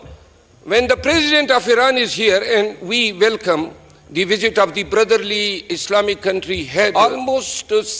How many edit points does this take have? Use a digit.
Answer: 1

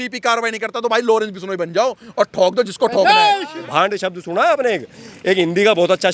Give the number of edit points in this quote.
1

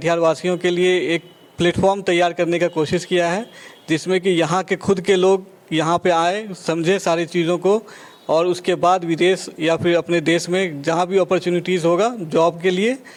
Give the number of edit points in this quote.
0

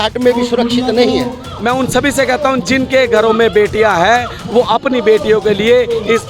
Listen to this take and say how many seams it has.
1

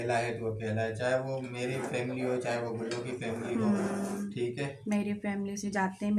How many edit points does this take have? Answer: 0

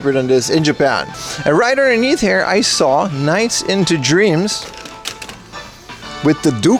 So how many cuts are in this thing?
0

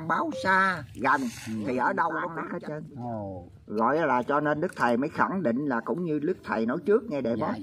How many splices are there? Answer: 1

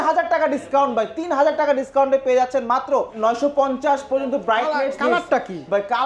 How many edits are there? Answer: 1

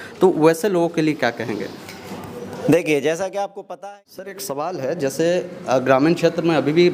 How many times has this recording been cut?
1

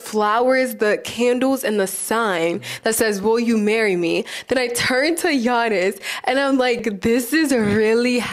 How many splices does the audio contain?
1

